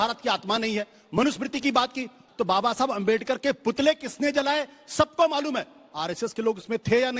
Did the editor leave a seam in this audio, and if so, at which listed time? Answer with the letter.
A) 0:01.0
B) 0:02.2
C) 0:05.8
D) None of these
B